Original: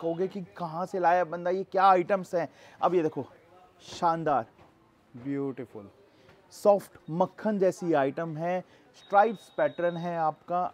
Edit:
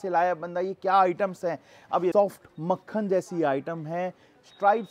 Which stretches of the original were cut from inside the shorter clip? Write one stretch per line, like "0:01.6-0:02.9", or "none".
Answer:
0:03.0-0:06.6